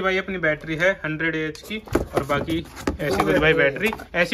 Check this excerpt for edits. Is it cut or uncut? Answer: uncut